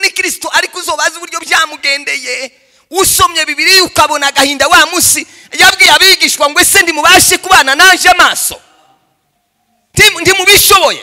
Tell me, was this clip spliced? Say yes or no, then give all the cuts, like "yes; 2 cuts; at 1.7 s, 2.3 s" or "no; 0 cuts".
no; 0 cuts